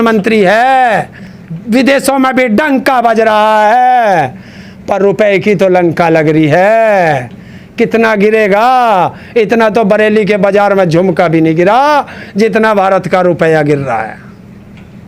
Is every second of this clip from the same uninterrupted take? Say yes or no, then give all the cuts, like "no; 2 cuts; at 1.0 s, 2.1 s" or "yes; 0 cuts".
yes; 0 cuts